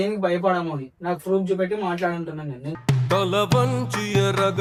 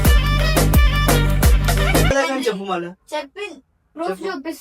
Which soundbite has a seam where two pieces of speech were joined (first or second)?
second